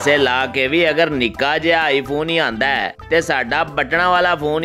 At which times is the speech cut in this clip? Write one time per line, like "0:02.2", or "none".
none